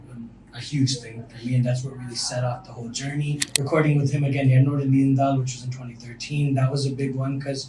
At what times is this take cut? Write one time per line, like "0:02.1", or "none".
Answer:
0:03.5

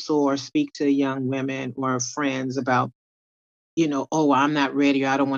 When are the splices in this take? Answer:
none

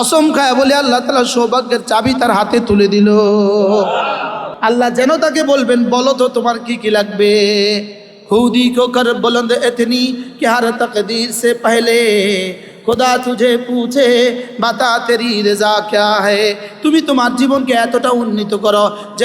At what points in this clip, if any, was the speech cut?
0:04.4

